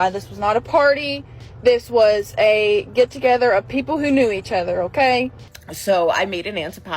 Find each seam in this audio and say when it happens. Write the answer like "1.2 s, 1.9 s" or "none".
5.4 s